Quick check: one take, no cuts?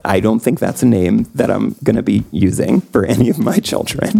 no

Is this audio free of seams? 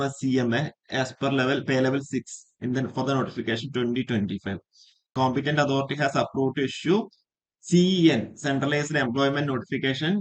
no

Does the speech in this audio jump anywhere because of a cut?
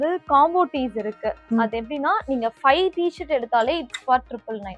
no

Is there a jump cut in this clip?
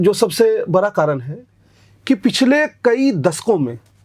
no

